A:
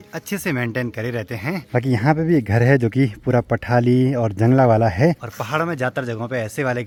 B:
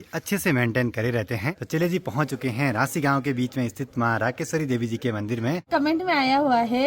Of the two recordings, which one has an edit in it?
B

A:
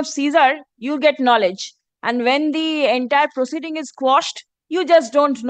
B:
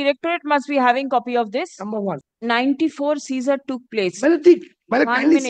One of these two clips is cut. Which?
B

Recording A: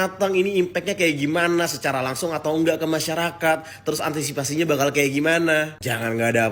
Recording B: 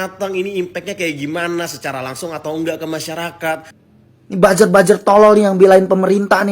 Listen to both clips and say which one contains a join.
B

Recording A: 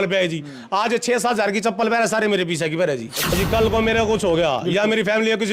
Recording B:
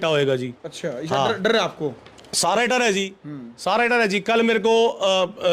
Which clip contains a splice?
A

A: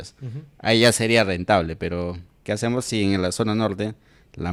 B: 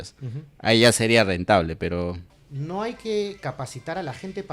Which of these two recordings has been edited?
B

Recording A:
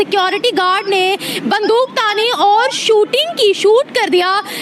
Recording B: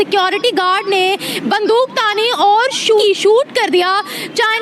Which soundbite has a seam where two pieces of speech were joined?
B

